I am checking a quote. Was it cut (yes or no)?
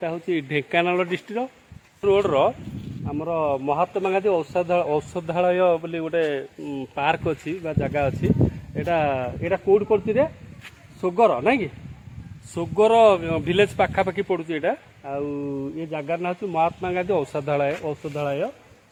no